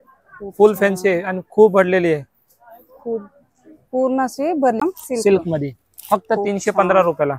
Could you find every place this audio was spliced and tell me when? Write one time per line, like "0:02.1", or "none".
0:04.8

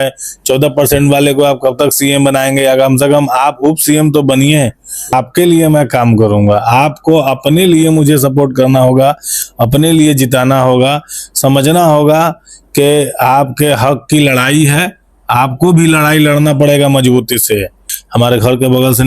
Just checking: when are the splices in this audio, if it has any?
0:05.1
0:17.9

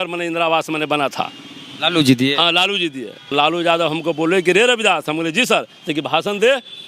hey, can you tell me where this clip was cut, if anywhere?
0:03.3

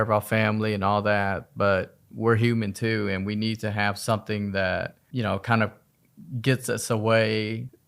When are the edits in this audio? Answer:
0:05.0

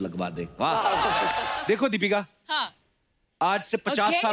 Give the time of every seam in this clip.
0:01.5

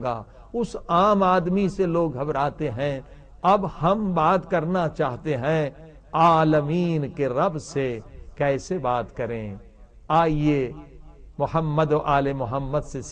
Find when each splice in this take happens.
0:09.3

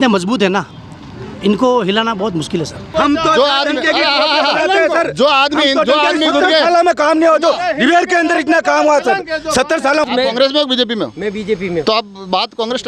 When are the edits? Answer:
0:02.8
0:10.0

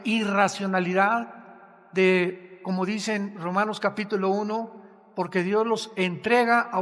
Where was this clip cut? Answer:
none

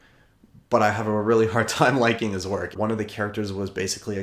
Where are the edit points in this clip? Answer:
0:02.7

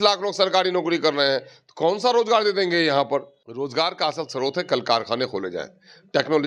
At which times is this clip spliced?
0:03.4

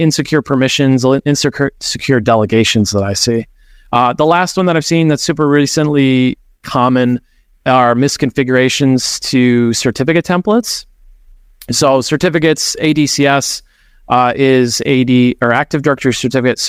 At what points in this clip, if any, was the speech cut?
none

